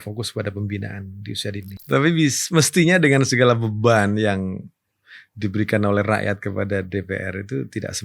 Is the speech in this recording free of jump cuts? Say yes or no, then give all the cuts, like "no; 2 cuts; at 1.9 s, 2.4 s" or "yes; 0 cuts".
no; 1 cut; at 1.7 s